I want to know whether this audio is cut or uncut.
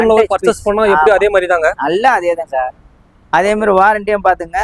uncut